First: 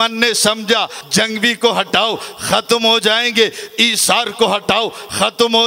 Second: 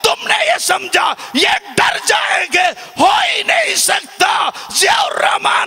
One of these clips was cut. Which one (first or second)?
first